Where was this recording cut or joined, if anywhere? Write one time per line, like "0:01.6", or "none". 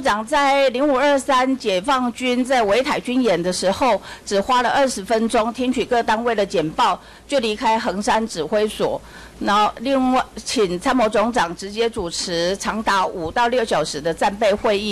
none